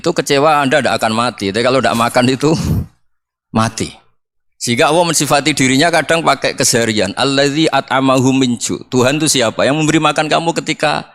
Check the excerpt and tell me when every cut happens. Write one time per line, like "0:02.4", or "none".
none